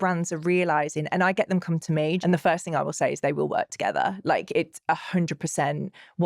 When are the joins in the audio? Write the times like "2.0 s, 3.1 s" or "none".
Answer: 2.2 s